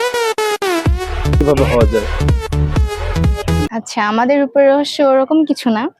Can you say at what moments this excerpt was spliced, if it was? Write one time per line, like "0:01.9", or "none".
0:03.7